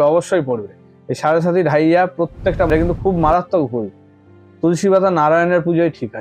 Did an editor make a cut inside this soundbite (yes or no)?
yes